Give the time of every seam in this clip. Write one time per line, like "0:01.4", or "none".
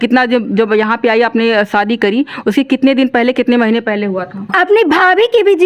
0:04.5

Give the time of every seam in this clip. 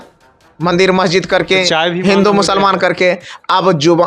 none

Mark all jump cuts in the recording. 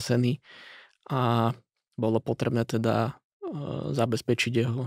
none

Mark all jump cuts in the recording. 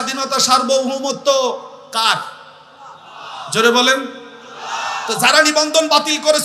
none

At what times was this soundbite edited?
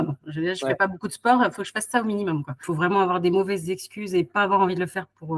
0:02.7

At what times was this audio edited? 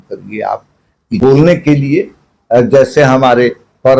0:01.2

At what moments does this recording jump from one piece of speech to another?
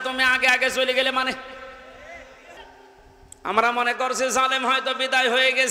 0:02.6

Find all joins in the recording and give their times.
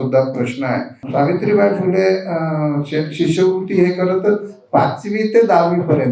0:01.0

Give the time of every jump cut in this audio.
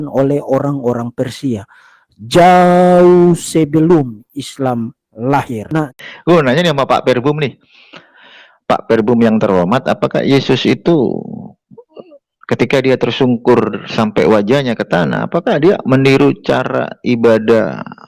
0:05.9

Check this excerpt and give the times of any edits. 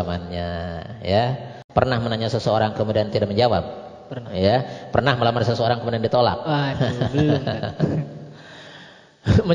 0:01.5

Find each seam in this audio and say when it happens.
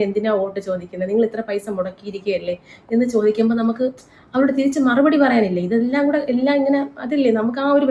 none

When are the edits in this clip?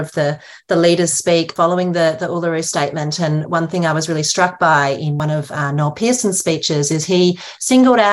0:01.5
0:05.2

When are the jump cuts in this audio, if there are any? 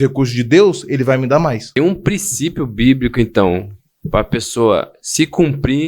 0:01.6

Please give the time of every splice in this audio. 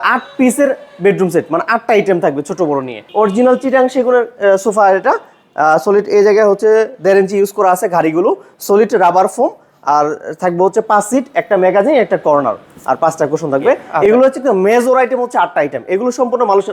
0:03.0
0:13.9

